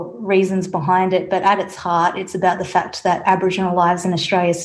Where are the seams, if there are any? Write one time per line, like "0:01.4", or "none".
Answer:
none